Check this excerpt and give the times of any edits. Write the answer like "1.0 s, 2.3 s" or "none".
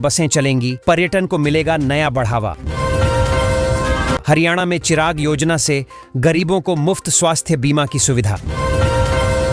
none